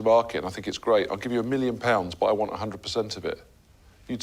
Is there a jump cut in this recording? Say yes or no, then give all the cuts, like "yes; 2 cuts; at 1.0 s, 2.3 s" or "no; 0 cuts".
no; 0 cuts